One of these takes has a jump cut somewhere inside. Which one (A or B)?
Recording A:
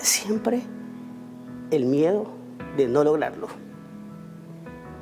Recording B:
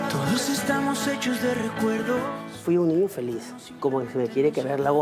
B